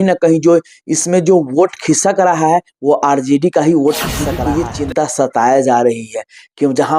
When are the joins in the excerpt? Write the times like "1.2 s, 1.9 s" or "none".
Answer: 4.3 s

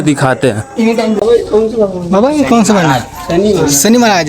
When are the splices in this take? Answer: 1.2 s

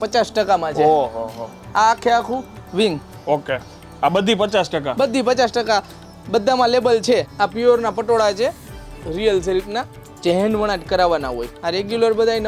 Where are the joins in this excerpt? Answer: 7.3 s, 11.5 s

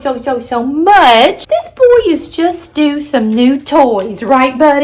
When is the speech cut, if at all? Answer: 1.4 s

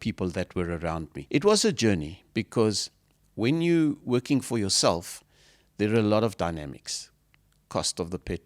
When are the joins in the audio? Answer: 1.1 s

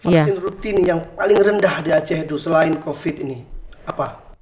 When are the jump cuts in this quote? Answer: none

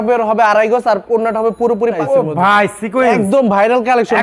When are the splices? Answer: 2.0 s

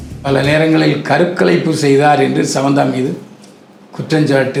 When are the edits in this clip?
none

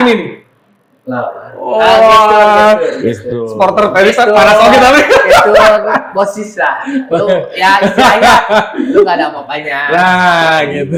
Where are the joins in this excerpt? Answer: none

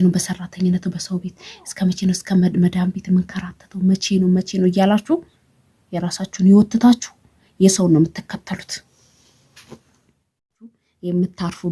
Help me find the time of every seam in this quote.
10.4 s

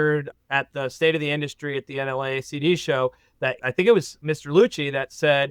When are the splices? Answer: none

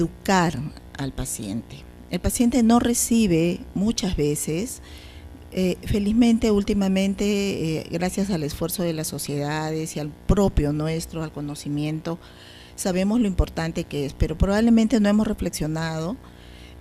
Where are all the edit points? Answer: 1.8 s

